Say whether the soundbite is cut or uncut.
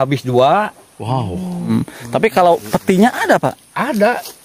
cut